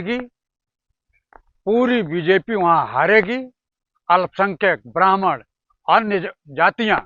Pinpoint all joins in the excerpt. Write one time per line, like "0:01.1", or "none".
none